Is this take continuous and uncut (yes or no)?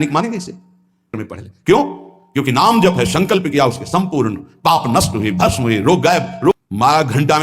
no